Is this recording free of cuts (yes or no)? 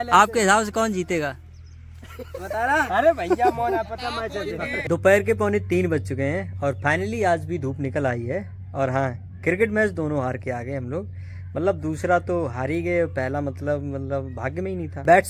yes